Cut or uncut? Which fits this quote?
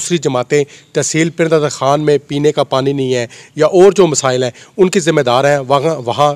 uncut